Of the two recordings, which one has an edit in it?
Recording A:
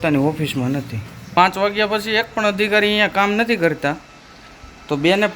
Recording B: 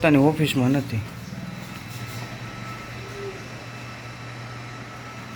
A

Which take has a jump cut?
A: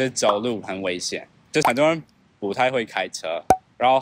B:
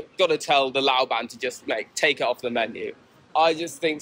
A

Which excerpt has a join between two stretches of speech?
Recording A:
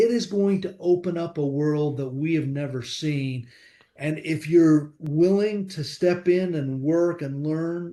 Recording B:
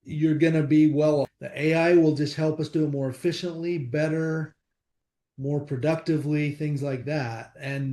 B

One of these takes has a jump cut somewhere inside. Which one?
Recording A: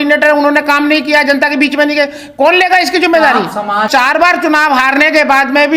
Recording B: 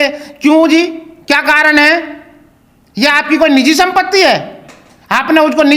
A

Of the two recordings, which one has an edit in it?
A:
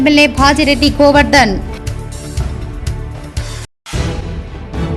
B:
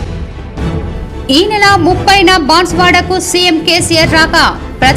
B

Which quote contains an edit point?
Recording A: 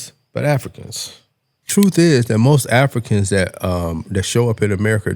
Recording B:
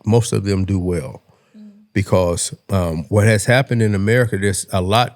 A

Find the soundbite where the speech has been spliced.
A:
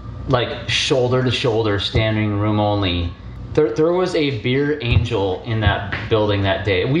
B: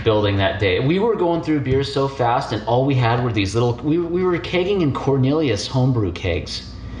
A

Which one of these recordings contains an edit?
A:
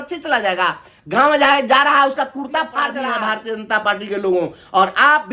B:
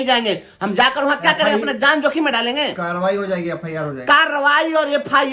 A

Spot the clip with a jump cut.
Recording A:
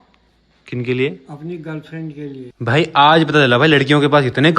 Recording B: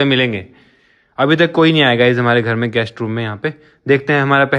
A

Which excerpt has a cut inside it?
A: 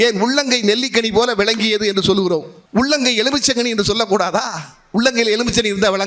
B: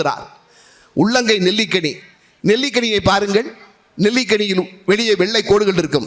A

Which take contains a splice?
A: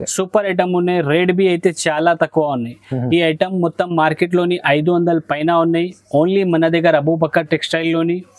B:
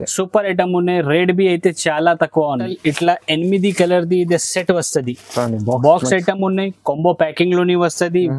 B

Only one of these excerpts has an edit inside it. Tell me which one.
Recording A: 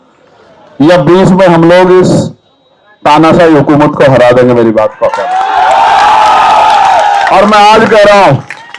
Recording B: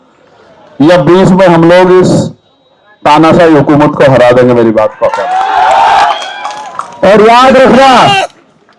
B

